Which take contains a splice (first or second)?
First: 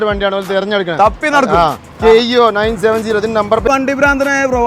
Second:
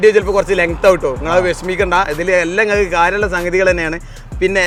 first